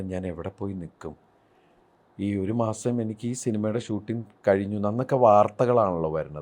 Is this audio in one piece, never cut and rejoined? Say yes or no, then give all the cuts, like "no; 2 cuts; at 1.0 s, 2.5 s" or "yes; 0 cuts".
yes; 0 cuts